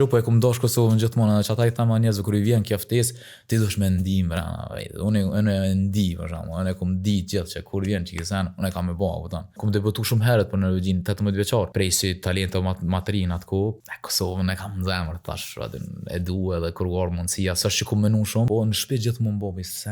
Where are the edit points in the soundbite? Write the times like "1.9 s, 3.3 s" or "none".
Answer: 9.6 s, 11.7 s, 13.8 s, 18.5 s